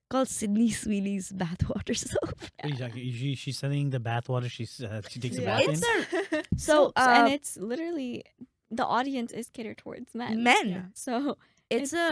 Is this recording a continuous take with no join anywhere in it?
yes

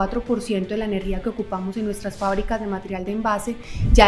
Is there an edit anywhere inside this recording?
no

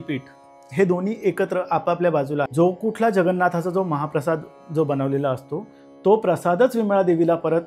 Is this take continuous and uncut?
no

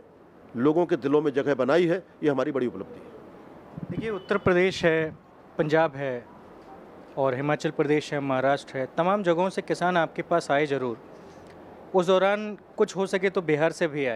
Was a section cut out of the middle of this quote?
no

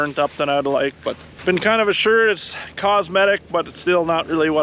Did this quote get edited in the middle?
yes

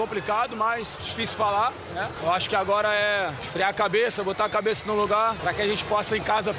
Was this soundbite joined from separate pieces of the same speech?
yes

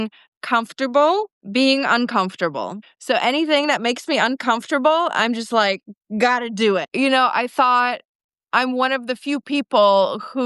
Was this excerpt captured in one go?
no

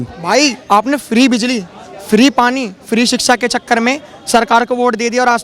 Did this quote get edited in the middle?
no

